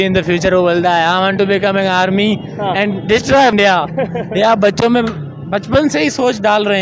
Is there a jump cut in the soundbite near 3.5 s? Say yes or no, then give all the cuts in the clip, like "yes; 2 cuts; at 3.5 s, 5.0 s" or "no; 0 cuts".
yes; 1 cut; at 3.5 s